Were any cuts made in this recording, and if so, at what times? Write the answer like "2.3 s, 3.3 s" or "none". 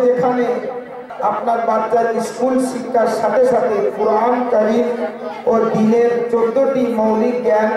1.0 s